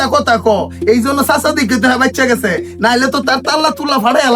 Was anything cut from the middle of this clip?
no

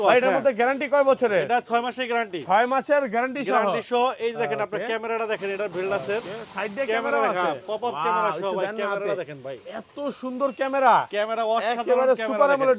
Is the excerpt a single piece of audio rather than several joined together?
yes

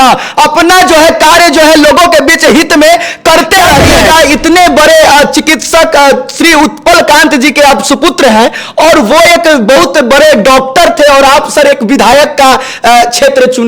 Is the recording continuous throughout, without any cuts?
no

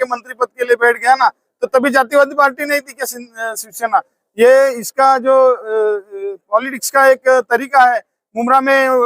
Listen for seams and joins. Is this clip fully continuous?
yes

